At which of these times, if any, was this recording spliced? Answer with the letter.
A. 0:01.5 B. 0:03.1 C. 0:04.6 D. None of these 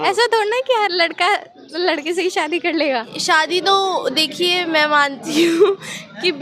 B